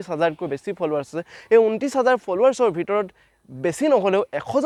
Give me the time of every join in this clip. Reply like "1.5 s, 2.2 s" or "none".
none